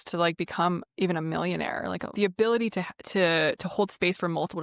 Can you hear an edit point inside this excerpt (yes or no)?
yes